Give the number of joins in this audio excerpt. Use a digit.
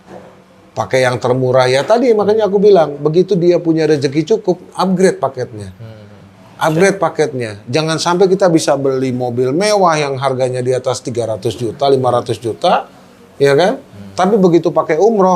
0